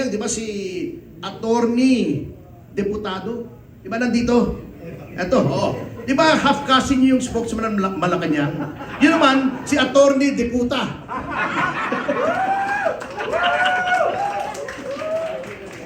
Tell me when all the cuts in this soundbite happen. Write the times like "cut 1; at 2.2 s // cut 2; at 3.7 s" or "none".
none